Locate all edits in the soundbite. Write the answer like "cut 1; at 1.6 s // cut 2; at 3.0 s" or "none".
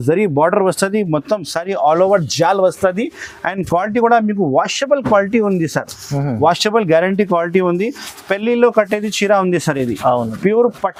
none